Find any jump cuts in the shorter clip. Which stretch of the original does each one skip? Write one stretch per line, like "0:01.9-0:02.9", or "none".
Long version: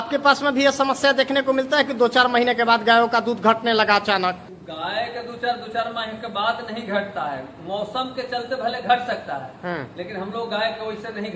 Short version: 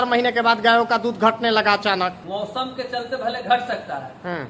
0:04.4-0:07.6